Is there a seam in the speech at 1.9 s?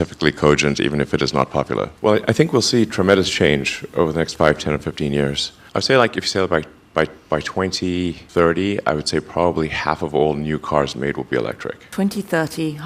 yes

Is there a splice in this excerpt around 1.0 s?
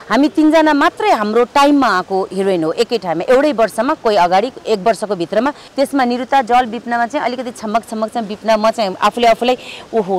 no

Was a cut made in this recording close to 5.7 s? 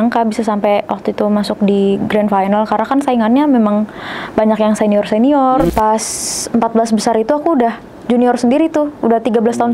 yes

